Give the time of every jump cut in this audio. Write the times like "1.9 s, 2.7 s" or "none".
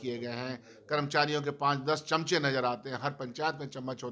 none